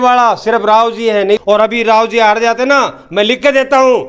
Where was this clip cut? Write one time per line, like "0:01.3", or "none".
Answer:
0:01.4